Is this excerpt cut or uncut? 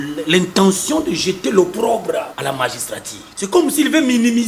cut